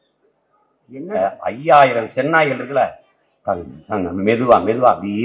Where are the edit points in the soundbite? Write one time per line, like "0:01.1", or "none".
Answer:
0:01.2